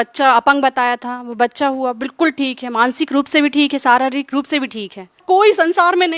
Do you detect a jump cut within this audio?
yes; 1 cut; at 5.2 s

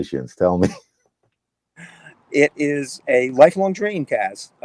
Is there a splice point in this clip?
no; 0 cuts

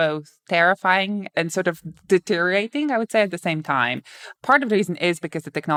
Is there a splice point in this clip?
no; 0 cuts

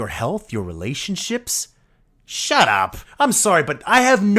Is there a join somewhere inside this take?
yes; 1 cut; at 3.0 s

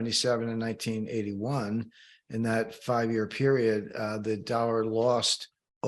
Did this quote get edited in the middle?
no; 0 cuts

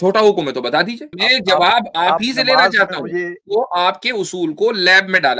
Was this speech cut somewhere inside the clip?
yes; 2 cuts; at 1.1 s, 3.4 s

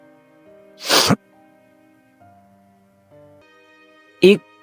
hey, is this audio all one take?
no; 1 cut; at 3.4 s

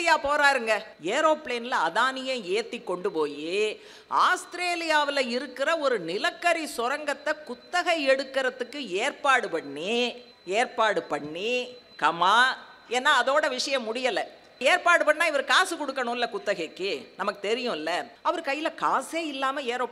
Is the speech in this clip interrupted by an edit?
yes; 4 cuts; at 0.9 s, 10.3 s, 14.6 s, 18.1 s

